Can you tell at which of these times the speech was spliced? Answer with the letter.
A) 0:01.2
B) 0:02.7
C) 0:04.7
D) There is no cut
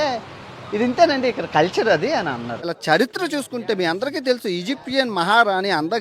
B